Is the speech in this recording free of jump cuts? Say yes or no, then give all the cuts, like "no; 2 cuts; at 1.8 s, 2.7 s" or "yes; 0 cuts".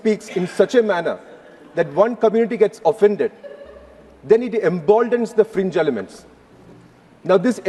yes; 0 cuts